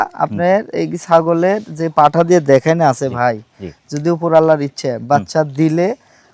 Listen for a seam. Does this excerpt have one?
no; 0 cuts

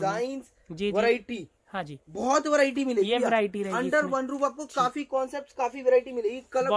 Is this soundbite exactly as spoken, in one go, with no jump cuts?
yes; 0 cuts

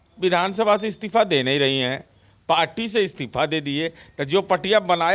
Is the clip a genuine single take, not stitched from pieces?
yes; 0 cuts

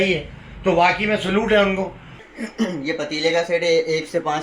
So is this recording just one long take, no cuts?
no; 1 cut; at 2.1 s

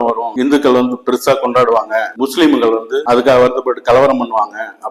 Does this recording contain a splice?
no; 0 cuts

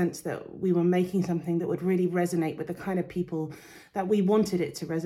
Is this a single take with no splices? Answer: yes; 0 cuts

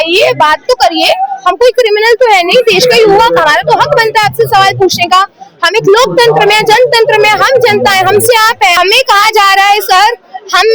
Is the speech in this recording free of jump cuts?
no; 1 cut; at 8.8 s

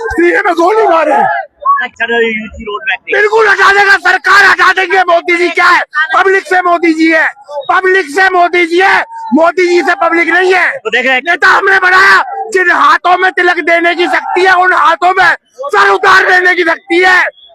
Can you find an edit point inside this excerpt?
yes; 1 cut; at 1.9 s

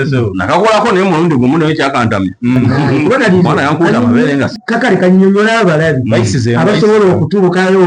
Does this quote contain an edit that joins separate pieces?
yes; 1 cut; at 4.5 s

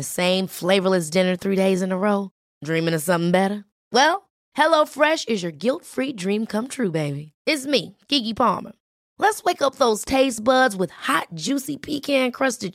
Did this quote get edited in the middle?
no; 0 cuts

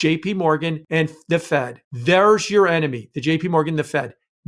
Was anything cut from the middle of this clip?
yes; 2 cuts; at 0.8 s, 1.8 s

